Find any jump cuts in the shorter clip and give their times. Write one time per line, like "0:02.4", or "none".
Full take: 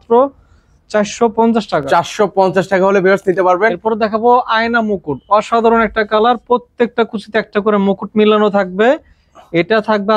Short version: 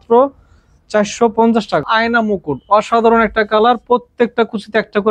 0:01.9